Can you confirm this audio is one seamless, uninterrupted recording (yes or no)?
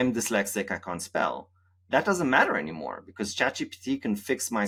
yes